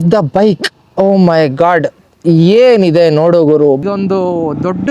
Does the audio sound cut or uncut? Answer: cut